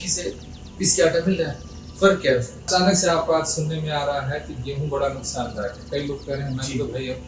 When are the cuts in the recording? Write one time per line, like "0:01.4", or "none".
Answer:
0:02.7